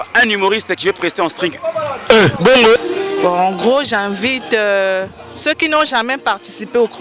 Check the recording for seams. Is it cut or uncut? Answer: cut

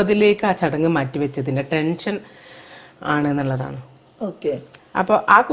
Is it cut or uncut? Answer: uncut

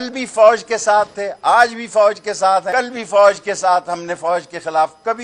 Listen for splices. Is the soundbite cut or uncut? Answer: cut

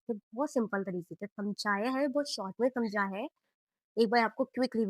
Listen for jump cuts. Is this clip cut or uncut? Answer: cut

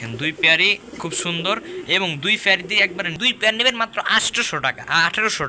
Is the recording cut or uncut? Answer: cut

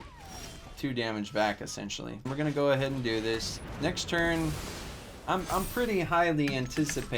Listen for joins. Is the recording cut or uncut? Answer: cut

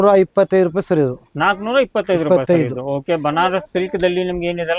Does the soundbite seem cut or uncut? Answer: uncut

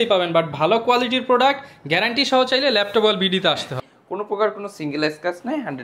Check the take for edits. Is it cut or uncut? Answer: cut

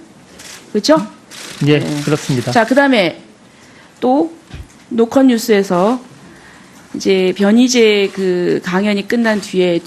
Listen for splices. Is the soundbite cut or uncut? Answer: cut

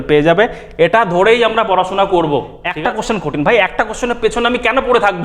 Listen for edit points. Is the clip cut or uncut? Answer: cut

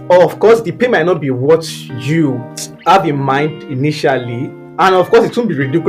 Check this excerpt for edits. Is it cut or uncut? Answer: cut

